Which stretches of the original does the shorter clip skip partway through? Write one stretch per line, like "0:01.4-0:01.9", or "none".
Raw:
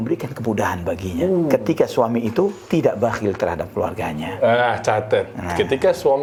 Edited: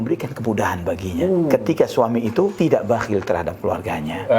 0:02.5-0:02.7